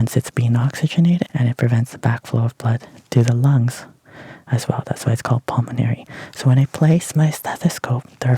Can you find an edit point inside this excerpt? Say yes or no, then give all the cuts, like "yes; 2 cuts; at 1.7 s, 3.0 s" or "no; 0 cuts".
yes; 1 cut; at 1.3 s